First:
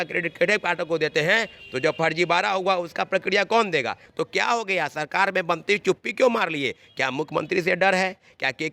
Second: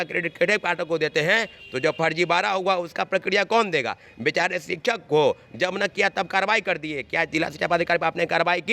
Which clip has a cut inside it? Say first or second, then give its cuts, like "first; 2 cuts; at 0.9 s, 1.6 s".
first; 1 cut; at 4.0 s